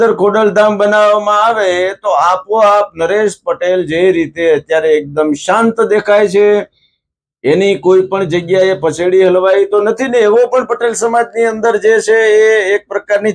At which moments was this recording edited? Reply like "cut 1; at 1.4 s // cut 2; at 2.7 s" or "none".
none